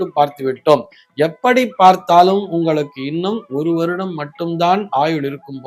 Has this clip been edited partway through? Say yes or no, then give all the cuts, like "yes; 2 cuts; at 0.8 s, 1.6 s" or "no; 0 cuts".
no; 0 cuts